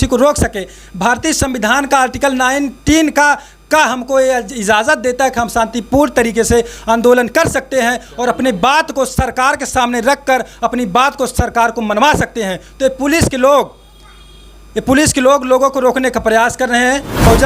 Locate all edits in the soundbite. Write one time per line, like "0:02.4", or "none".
none

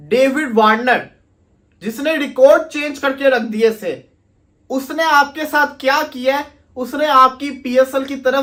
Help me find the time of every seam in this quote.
none

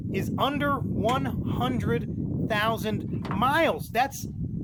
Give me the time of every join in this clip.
none

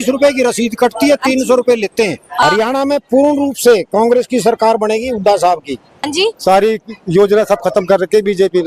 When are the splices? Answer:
0:02.4
0:06.1

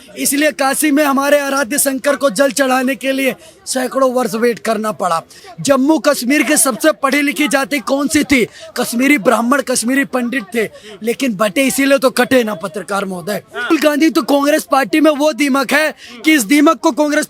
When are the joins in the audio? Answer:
0:05.4
0:13.7

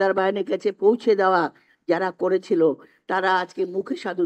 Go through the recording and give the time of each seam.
none

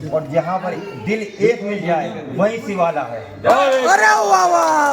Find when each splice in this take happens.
none

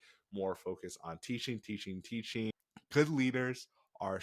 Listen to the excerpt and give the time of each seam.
0:02.5

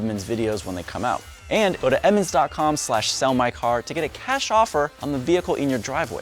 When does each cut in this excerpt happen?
0:01.8
0:05.0

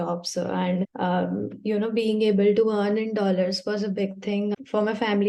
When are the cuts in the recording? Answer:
none

